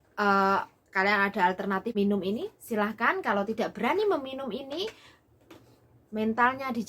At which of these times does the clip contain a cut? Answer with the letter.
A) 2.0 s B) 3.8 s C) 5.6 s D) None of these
A